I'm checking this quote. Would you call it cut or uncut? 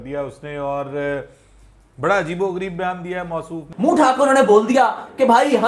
cut